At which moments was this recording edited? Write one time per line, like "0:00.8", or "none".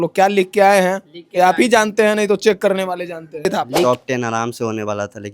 0:03.5